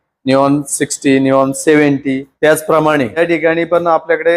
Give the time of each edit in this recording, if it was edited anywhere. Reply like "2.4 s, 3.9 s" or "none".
2.3 s, 3.2 s